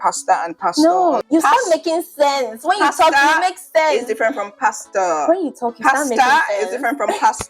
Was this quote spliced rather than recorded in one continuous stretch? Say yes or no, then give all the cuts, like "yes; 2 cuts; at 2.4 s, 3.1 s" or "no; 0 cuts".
yes; 1 cut; at 1.2 s